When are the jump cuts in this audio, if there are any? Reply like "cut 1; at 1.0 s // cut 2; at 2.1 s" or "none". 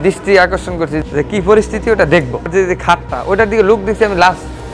cut 1; at 1.0 s // cut 2; at 2.5 s